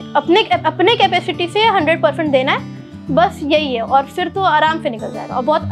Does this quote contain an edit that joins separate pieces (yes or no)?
no